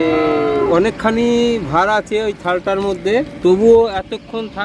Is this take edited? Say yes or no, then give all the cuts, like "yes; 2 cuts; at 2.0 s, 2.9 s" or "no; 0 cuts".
yes; 2 cuts; at 0.7 s, 3.3 s